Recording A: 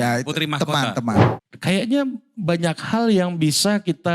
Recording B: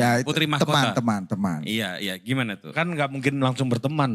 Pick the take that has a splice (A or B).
A